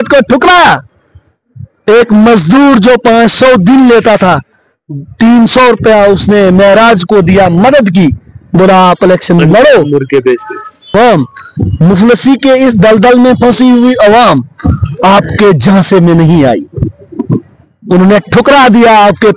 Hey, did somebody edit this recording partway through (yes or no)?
yes